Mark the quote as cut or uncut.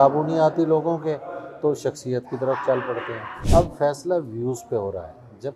cut